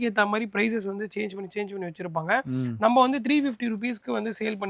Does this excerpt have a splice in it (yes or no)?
no